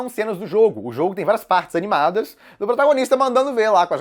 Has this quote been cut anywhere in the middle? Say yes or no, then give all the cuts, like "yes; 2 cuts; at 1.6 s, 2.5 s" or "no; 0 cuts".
no; 0 cuts